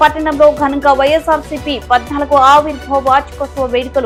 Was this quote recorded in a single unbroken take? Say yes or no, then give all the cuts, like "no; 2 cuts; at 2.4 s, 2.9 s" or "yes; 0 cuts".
yes; 0 cuts